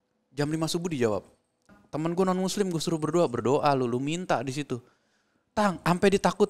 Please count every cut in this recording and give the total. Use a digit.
1